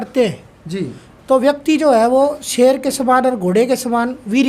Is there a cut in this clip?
no; 0 cuts

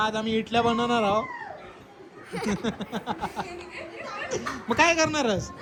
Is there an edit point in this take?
no; 0 cuts

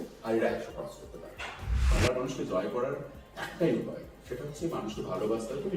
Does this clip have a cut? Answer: yes; 1 cut; at 1.9 s

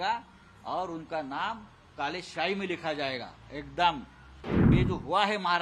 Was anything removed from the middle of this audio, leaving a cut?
yes; 1 cut; at 4.7 s

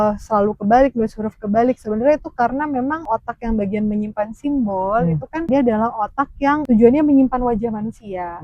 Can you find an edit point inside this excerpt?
yes; 3 cuts; at 3.1 s, 5.5 s, 6.6 s

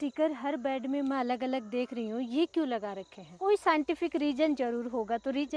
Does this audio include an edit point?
yes; 1 cut; at 3.4 s

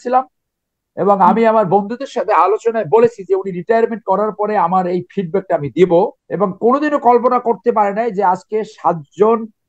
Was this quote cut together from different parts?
yes; 1 cut; at 6.2 s

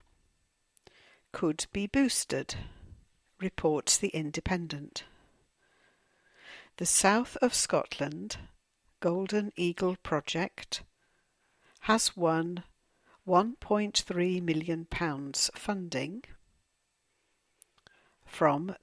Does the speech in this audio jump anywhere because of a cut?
no; 0 cuts

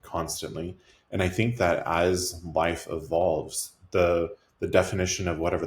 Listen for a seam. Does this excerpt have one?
no; 0 cuts

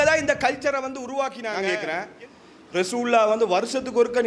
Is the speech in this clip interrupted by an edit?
yes; 1 cut; at 1.6 s

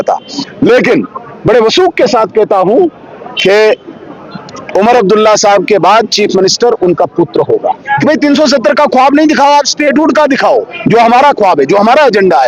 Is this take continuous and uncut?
no; 1 cut; at 7.9 s

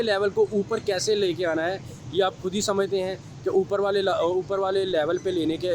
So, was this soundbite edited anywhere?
no; 0 cuts

